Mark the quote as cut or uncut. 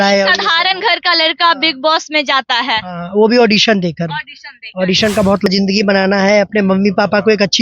cut